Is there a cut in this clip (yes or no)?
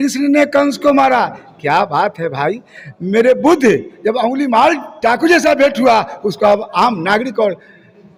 no